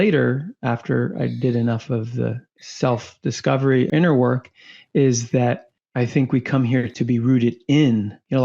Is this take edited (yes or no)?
no